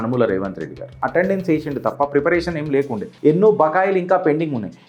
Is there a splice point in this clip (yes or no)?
yes